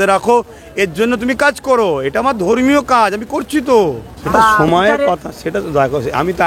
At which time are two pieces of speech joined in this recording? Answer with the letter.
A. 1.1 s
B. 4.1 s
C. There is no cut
B